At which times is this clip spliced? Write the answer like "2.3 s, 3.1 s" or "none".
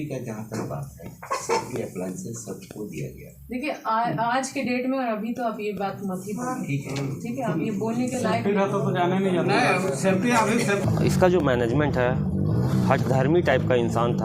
10.8 s